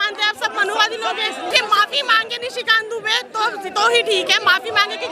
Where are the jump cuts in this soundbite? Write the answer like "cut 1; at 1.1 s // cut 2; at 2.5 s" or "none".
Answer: cut 1; at 1.5 s